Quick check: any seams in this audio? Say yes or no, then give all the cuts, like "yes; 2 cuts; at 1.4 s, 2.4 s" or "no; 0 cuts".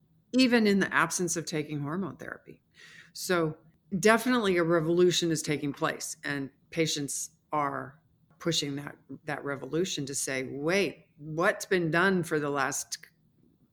yes; 1 cut; at 3.8 s